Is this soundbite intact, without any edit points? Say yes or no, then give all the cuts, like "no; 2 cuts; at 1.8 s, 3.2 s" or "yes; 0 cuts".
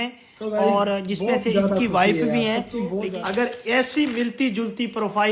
no; 1 cut; at 3.1 s